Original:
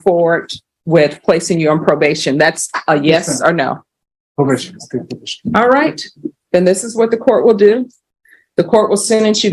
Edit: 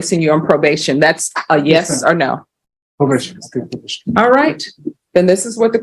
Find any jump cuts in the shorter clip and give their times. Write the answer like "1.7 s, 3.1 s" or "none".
none